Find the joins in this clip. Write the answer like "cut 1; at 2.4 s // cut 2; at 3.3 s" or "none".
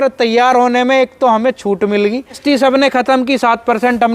cut 1; at 2.4 s